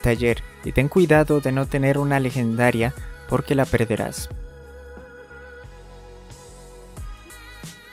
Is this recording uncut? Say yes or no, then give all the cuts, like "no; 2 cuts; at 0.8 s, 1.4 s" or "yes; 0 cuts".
yes; 0 cuts